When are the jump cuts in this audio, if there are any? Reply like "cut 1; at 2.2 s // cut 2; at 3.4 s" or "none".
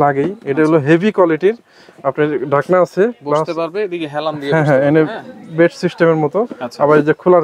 none

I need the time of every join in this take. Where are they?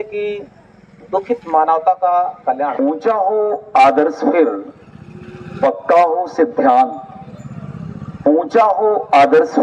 cut 1; at 2.7 s

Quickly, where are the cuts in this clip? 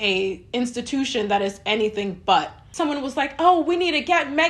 cut 1; at 2.6 s

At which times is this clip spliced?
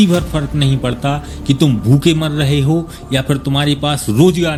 none

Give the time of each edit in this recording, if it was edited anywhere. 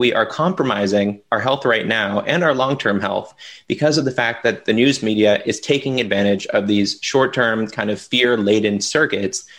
none

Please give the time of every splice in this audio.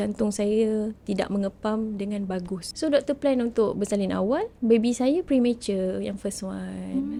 none

